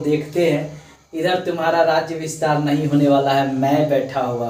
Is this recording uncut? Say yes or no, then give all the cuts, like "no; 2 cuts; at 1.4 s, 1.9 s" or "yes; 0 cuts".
yes; 0 cuts